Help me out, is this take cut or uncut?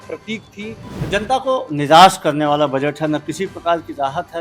cut